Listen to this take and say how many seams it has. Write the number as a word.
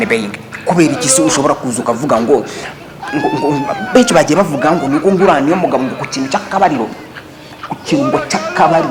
zero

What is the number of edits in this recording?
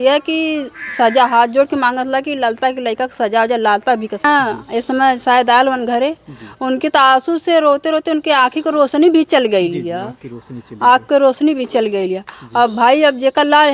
one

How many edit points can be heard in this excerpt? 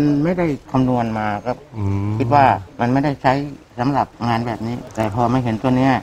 zero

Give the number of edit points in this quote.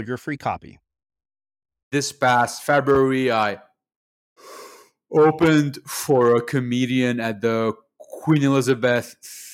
one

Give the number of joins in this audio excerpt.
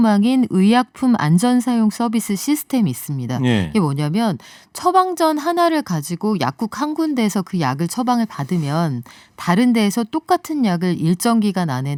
zero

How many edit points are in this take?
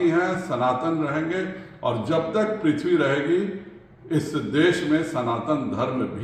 zero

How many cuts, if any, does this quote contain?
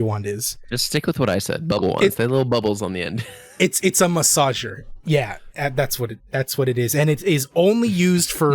zero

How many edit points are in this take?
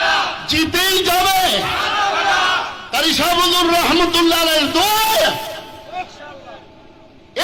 zero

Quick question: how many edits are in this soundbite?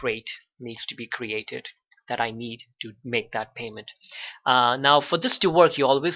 zero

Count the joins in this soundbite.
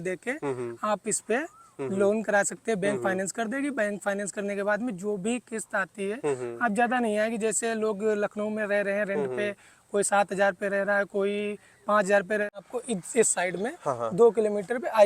one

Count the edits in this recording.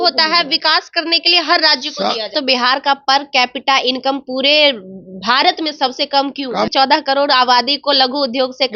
two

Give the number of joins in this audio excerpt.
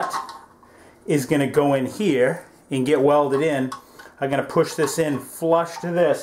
zero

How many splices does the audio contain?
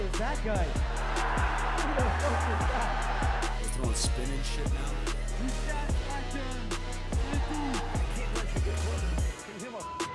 zero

